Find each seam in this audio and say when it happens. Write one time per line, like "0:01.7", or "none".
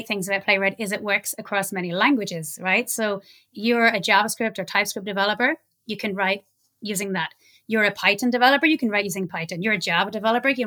none